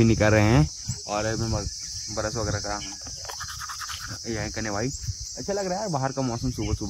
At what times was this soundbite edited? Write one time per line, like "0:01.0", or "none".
none